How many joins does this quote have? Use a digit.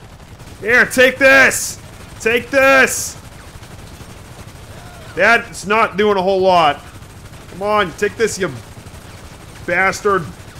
0